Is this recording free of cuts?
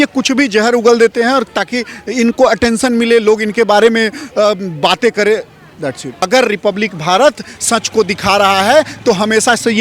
no; 1 cut; at 6.2 s

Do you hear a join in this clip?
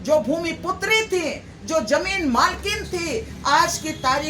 no; 0 cuts

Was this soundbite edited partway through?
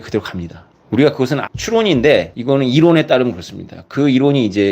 yes; 2 cuts; at 1.5 s, 2.3 s

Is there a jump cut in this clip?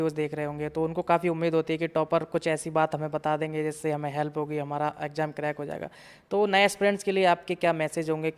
no; 0 cuts

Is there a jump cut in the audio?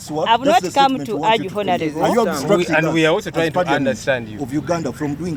no; 0 cuts

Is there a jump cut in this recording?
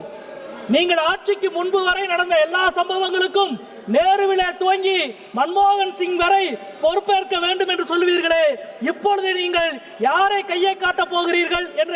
no; 0 cuts

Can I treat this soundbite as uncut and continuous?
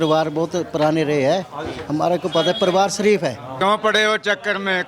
no; 1 cut; at 3.5 s

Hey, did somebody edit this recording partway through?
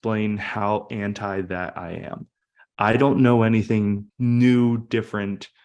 yes; 1 cut; at 4.1 s

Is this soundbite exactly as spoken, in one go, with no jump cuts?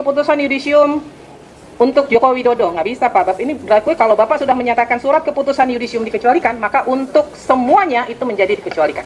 yes; 0 cuts

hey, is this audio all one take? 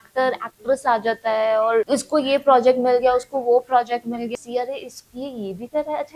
no; 2 cuts; at 1.9 s, 4.3 s

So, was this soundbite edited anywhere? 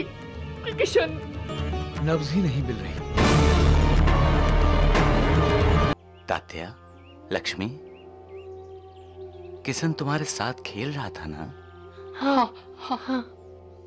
yes; 2 cuts; at 1.5 s, 5.9 s

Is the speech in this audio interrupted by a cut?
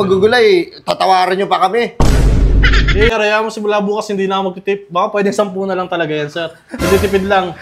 yes; 1 cut; at 3.1 s

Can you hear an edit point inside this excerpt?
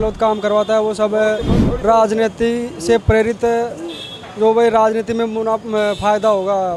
no; 0 cuts

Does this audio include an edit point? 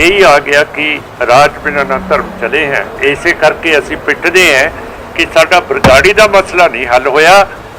yes; 1 cut; at 3.0 s

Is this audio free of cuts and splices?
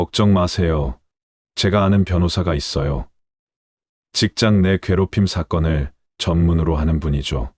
yes; 0 cuts

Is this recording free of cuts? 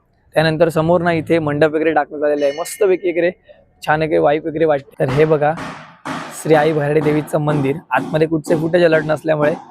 no; 1 cut; at 4.9 s

